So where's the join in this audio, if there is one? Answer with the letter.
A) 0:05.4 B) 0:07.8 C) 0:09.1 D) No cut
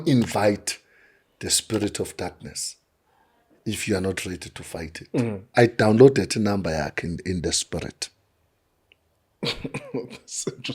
A